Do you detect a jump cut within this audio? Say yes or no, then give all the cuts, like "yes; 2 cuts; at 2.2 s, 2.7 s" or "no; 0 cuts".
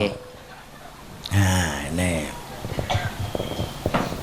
no; 0 cuts